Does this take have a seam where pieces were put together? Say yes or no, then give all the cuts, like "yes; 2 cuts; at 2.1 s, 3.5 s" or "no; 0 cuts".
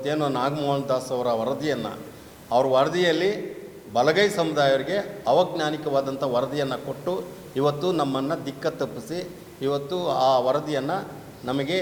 no; 0 cuts